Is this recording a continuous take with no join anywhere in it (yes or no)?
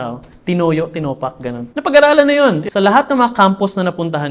no